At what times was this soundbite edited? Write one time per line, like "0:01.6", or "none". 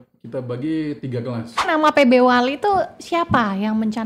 0:01.6